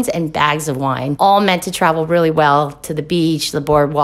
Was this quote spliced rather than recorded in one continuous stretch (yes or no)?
no